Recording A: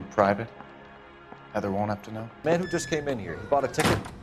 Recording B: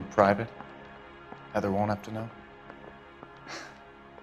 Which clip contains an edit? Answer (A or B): A